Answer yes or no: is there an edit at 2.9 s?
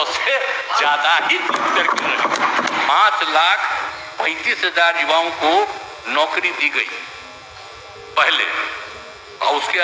yes